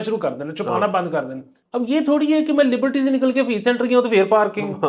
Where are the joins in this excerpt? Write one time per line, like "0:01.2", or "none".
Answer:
0:01.5